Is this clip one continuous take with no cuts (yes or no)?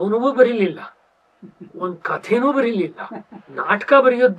yes